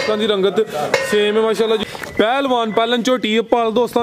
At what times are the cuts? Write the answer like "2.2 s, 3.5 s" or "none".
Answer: 1.8 s